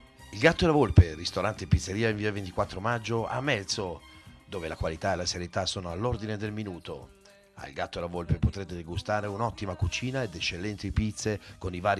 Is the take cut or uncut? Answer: uncut